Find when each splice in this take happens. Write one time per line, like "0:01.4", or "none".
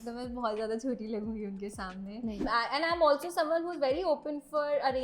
0:02.4